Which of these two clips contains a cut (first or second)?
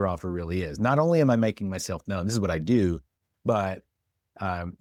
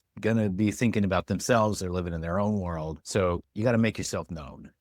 second